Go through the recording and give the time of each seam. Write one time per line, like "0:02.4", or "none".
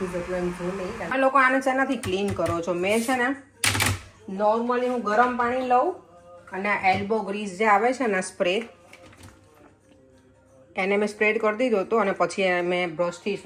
0:01.1